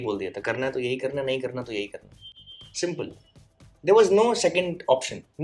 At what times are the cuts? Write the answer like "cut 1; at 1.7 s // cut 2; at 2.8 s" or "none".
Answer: none